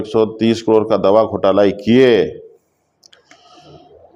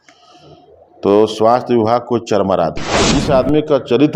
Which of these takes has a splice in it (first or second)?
second